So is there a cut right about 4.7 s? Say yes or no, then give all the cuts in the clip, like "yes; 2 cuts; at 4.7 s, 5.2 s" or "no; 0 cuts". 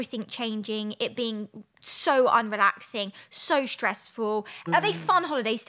yes; 1 cut; at 4.7 s